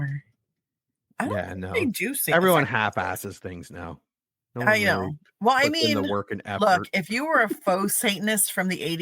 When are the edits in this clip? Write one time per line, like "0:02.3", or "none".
0:01.0